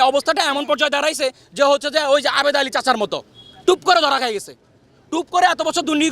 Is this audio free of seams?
yes; 0 cuts

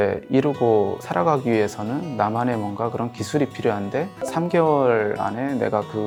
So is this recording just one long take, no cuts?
yes; 0 cuts

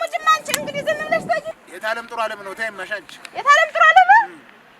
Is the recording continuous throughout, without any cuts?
no; 1 cut; at 1.5 s

